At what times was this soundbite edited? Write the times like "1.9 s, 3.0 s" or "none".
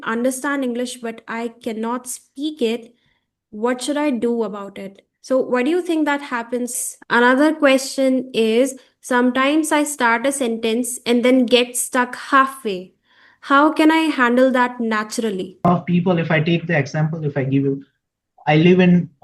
6.8 s, 15.7 s